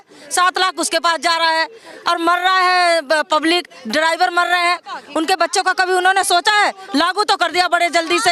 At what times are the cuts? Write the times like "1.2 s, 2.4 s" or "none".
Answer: none